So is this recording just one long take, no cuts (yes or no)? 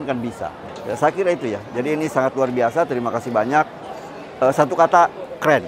yes